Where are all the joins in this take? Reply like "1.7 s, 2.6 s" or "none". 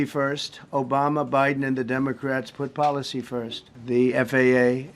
3.6 s